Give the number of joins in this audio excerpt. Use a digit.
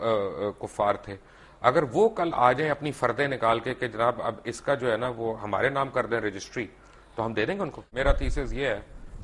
1